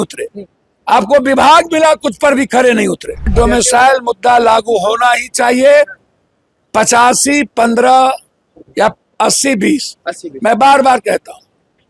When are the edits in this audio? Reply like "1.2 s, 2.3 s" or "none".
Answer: 3.3 s